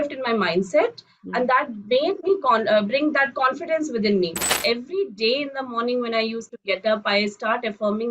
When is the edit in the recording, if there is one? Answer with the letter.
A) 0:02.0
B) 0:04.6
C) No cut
B